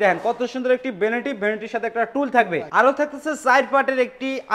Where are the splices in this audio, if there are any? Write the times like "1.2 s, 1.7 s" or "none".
none